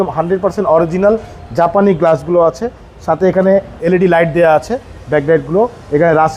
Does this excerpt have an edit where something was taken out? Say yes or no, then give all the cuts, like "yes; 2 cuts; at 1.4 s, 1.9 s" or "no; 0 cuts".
yes; 1 cut; at 3.8 s